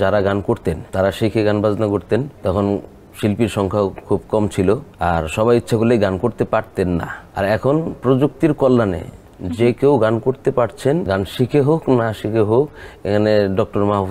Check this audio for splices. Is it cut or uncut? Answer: cut